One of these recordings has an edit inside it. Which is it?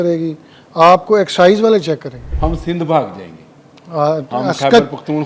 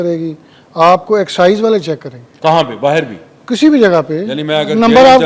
first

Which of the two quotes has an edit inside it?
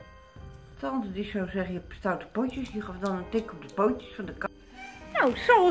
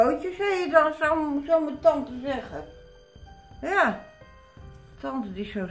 first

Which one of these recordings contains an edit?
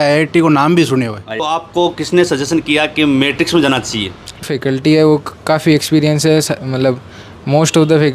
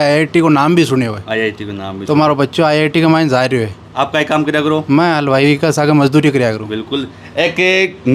first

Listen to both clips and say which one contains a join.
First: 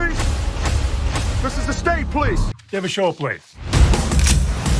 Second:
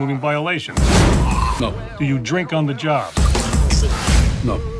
first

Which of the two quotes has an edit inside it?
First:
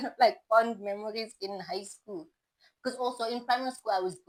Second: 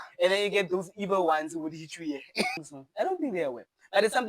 second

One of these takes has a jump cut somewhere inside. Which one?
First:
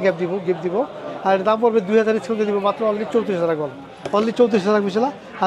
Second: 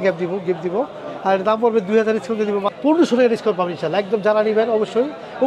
second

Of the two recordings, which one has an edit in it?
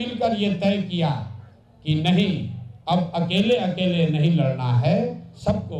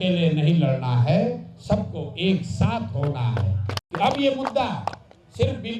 second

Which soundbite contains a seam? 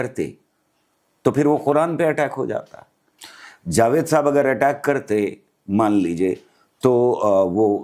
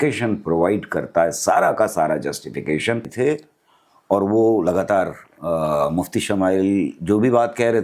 second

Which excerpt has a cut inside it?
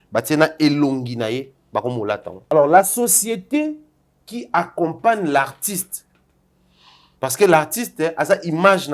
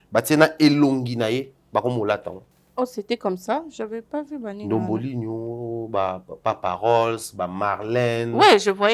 first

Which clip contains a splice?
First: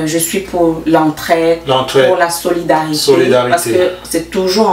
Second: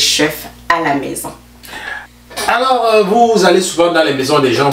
second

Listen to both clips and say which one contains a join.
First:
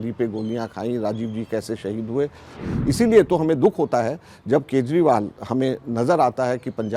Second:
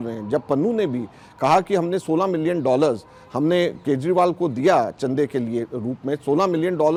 first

